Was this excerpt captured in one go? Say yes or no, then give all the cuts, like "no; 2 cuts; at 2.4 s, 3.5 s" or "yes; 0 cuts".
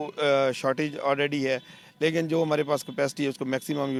yes; 0 cuts